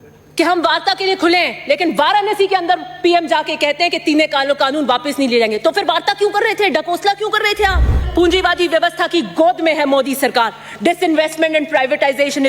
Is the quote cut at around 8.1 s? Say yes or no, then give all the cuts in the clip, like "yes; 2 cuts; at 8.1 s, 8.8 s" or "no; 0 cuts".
yes; 1 cut; at 8.1 s